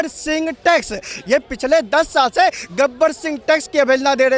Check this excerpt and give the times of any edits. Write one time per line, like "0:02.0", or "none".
none